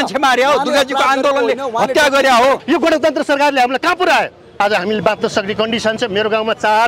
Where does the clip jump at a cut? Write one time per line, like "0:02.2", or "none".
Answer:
0:02.6